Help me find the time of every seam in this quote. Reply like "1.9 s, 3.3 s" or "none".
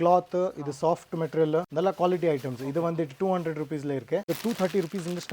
1.7 s, 4.3 s